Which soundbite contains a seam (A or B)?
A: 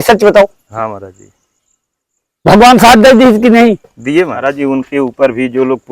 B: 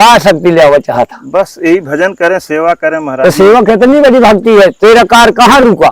A